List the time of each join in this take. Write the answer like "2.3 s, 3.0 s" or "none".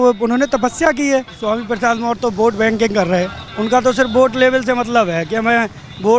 1.3 s, 3.4 s